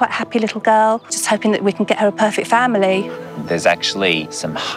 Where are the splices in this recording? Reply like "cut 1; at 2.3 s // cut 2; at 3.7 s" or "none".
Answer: cut 1; at 1.2 s // cut 2; at 3.2 s